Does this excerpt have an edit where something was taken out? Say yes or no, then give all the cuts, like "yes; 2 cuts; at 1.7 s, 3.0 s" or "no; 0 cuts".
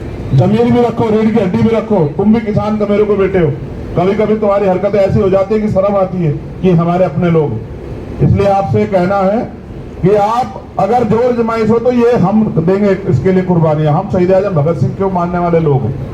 no; 0 cuts